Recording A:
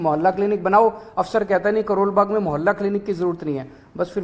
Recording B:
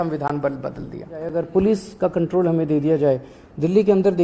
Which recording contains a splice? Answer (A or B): B